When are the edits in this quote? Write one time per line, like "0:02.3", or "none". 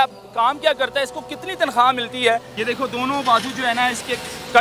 0:02.5